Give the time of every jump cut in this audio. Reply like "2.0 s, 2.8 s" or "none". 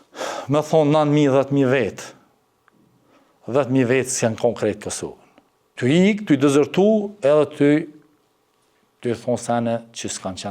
5.7 s